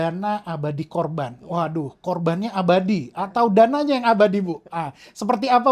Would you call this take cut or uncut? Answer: uncut